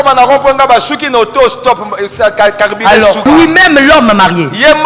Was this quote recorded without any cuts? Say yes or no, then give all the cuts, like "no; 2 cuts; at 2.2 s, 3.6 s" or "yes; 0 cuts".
no; 1 cut; at 3.2 s